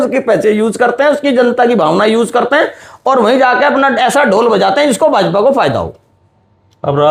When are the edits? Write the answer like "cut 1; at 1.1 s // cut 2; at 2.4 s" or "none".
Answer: none